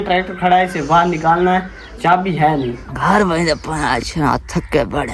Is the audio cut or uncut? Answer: cut